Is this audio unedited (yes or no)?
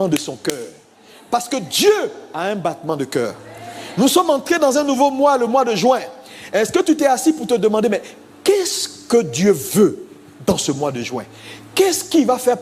yes